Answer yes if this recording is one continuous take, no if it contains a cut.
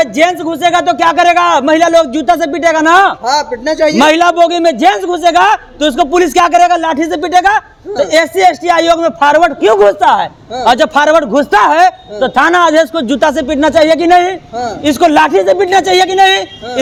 yes